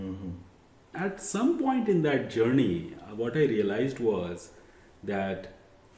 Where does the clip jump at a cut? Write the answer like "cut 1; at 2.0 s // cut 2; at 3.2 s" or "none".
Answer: cut 1; at 1.0 s